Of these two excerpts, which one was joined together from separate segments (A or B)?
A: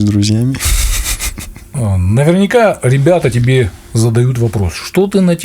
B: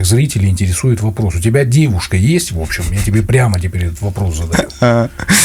A